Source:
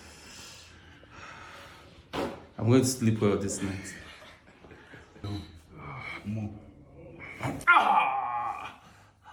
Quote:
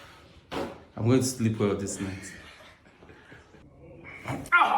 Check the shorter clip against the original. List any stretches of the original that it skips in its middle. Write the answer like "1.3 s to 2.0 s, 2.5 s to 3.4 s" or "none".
5.1 s to 6.7 s